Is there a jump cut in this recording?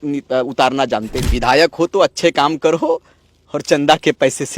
yes; 1 cut; at 1.2 s

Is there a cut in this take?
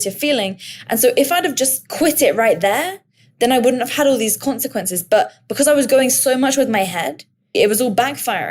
yes; 2 cuts; at 1.8 s, 7.5 s

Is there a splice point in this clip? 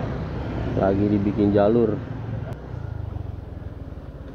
yes; 1 cut; at 2.5 s

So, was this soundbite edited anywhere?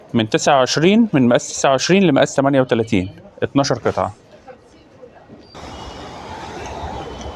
yes; 1 cut; at 5.5 s

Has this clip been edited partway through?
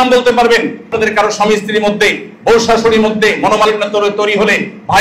yes; 1 cut; at 0.9 s

